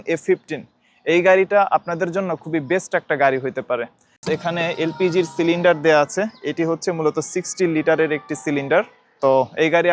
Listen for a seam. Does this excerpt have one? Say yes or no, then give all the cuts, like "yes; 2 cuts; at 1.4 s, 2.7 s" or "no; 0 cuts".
yes; 2 cuts; at 4.2 s, 9.0 s